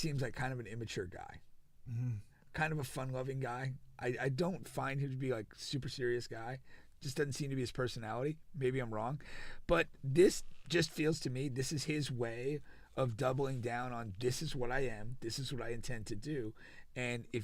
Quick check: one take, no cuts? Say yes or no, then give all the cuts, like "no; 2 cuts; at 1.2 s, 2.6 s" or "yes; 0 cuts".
yes; 0 cuts